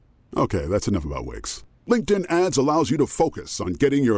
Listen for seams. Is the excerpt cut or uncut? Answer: uncut